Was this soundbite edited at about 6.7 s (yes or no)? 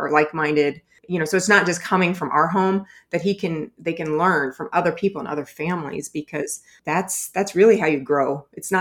no